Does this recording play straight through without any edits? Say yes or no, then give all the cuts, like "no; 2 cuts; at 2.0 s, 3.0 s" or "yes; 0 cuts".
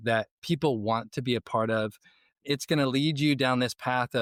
yes; 0 cuts